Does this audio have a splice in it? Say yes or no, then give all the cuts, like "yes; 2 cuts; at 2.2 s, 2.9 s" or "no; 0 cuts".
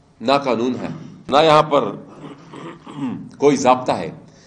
yes; 1 cut; at 1.4 s